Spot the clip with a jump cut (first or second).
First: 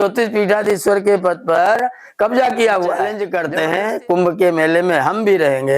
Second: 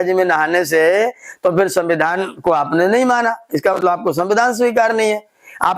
first